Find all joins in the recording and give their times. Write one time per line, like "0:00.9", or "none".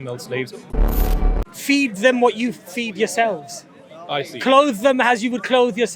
0:01.1